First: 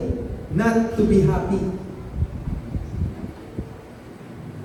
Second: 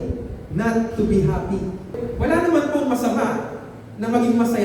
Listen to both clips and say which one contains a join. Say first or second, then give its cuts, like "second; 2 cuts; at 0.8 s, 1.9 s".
second; 1 cut; at 2.0 s